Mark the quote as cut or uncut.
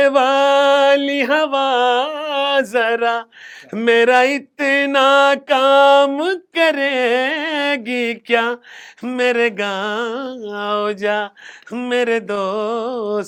uncut